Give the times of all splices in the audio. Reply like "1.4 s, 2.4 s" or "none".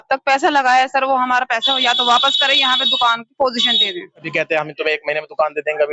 4.2 s